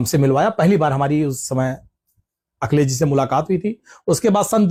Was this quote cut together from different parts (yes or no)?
no